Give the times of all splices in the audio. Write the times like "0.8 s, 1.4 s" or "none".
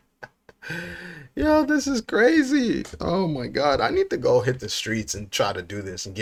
none